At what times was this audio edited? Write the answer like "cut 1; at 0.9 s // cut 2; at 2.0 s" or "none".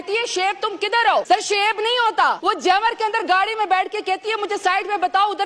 cut 1; at 1.2 s // cut 2; at 2.4 s

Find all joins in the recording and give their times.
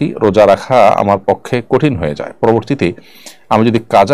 none

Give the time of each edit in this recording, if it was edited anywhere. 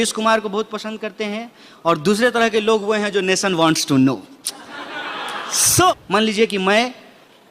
cut 1; at 5.9 s

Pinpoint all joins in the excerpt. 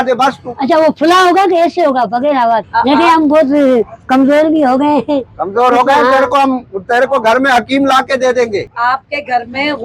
cut 1; at 2.7 s // cut 2; at 8.7 s

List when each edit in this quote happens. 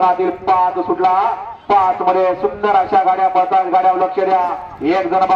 none

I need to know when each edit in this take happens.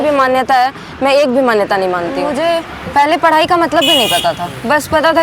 cut 1; at 2.2 s

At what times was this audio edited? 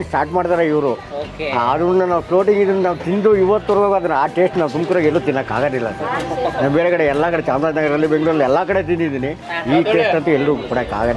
none

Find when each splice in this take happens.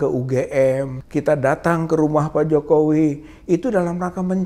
cut 1; at 1.0 s

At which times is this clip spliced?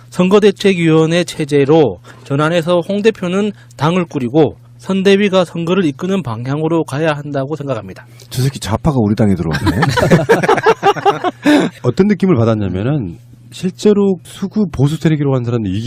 cut 1; at 7.2 s

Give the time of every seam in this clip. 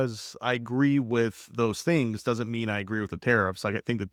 none

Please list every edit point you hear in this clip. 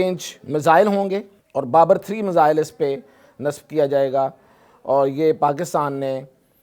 cut 1; at 1.4 s

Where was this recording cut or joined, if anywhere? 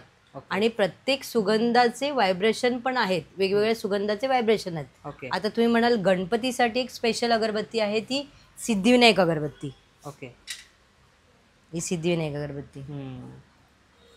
none

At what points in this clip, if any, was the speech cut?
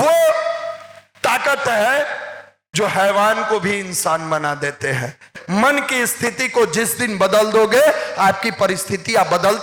cut 1; at 5.3 s

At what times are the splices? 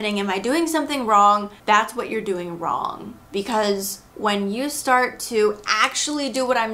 none

